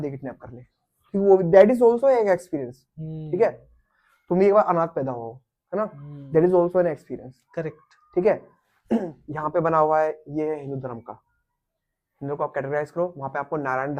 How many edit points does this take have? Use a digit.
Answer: 1